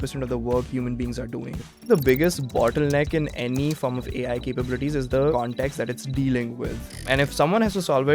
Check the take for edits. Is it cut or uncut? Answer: cut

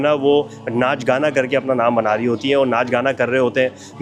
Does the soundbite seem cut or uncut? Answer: uncut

